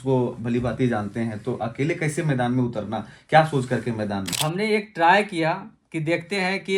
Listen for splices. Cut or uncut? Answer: cut